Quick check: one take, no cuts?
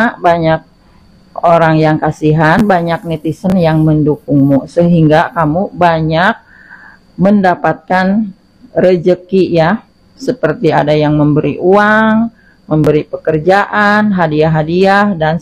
yes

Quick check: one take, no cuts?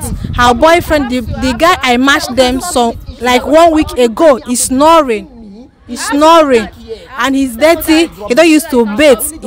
yes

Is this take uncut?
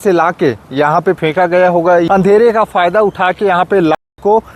no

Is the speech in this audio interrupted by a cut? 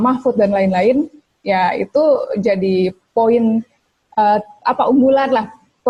no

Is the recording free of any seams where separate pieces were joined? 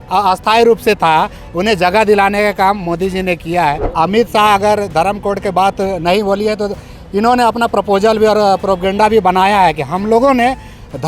no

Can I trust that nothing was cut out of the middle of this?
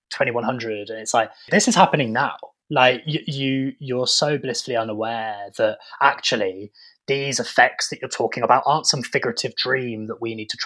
no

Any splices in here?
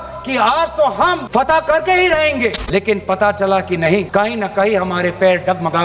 yes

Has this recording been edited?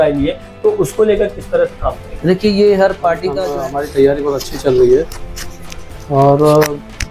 yes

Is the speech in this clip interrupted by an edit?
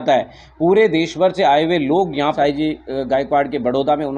yes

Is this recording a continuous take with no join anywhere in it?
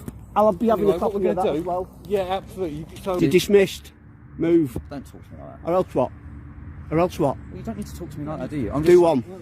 no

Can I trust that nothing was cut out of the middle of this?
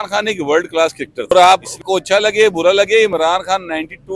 no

